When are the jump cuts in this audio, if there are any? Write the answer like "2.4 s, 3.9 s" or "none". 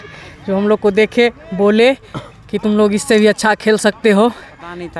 none